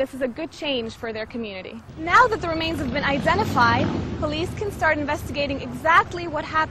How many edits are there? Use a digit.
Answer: 1